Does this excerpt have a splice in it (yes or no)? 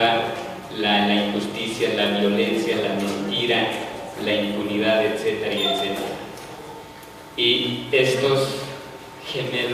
no